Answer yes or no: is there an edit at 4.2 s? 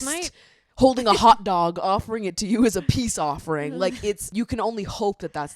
yes